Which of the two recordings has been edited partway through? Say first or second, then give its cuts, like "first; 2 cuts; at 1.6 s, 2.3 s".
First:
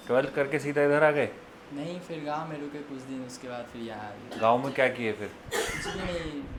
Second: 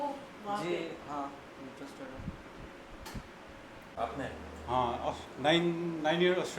second; 1 cut; at 3.9 s